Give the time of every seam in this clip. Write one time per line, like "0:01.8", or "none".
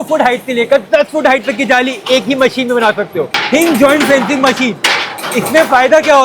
0:03.4